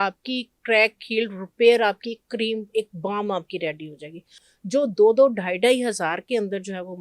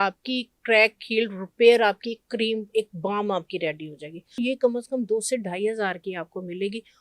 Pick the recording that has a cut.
second; 1 cut; at 4.4 s

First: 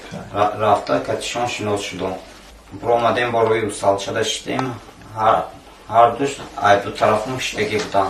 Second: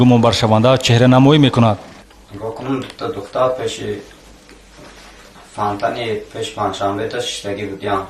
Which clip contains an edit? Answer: first; 1 cut; at 3.1 s

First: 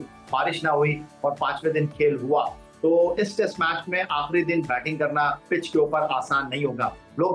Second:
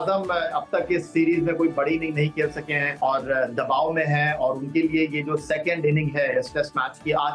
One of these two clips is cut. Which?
second; 1 cut; at 2.9 s

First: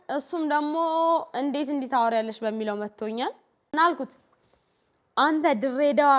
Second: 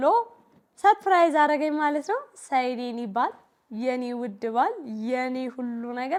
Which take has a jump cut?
first; 1 cut; at 3.5 s

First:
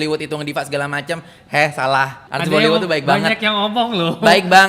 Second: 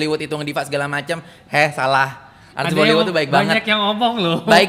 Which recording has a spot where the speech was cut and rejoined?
first; 1 cut; at 2.2 s

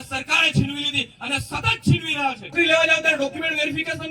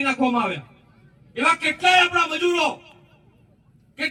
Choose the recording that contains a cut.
first; 1 cut; at 2.5 s

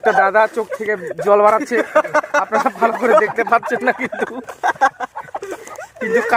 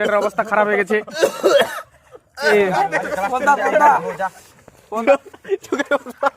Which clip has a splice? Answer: second; 2 cuts; at 2.5 s, 5.0 s

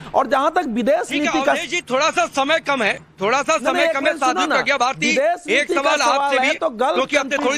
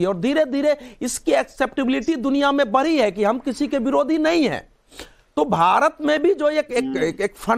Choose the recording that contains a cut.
second; 1 cut; at 6.4 s

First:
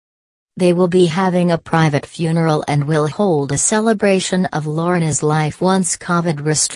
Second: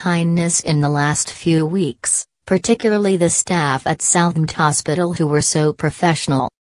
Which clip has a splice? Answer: second; 1 cut; at 4.5 s

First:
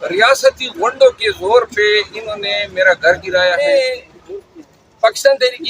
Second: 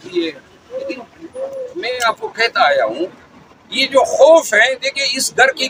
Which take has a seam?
first; 1 cut; at 3.6 s

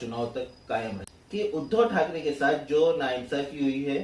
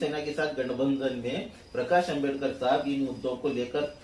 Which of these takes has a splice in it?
first; 1 cut; at 1.0 s

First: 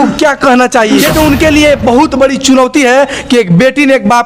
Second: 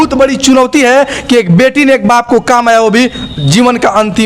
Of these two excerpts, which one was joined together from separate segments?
first; 1 cut; at 0.9 s

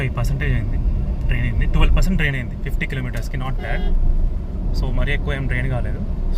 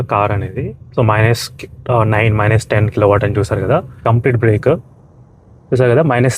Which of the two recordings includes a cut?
second; 1 cut; at 4.0 s

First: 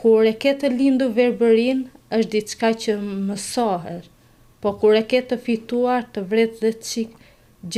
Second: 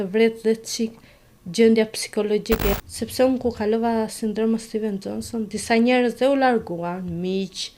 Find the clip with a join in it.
second; 1 cut; at 2.7 s

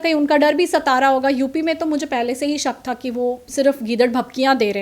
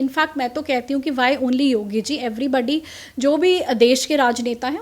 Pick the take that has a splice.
first; 1 cut; at 3.5 s

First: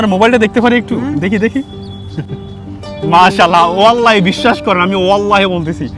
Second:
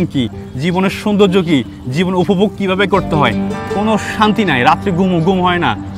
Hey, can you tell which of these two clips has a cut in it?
second; 1 cut; at 3.5 s

